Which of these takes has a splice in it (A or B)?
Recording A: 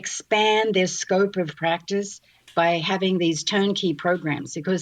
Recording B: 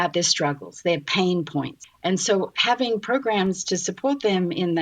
B